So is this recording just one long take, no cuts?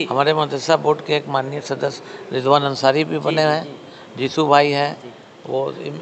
yes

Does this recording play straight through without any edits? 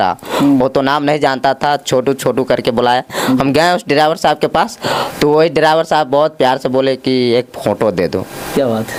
yes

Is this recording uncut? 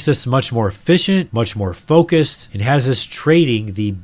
yes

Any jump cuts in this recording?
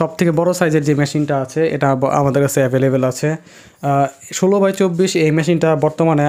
no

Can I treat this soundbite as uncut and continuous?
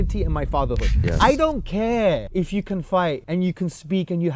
no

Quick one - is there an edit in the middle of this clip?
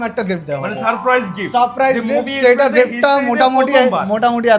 no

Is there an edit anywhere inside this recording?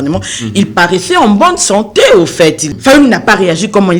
yes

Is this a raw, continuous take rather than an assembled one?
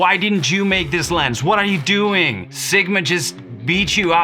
no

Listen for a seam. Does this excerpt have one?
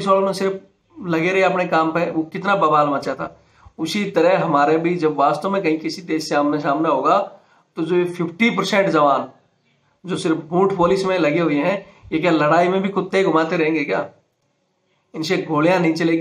no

